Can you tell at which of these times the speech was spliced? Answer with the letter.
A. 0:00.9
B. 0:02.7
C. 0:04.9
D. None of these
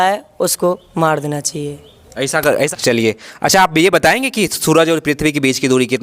B